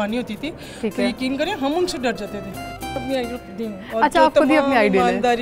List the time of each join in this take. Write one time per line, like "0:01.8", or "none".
0:03.0

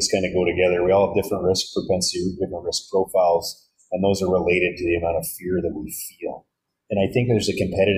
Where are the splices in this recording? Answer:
none

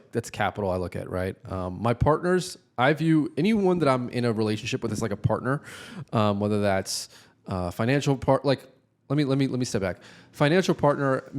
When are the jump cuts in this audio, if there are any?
none

